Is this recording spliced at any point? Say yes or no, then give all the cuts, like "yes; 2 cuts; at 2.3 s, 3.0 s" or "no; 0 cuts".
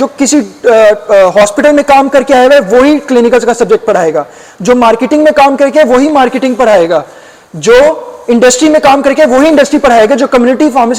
no; 0 cuts